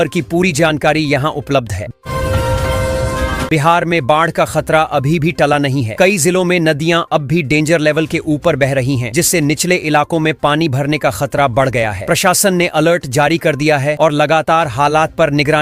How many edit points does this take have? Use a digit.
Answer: 2